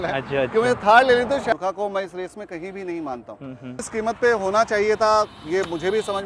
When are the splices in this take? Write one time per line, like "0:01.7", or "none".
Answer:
0:01.5
0:03.8